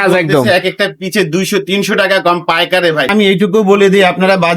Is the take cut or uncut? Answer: cut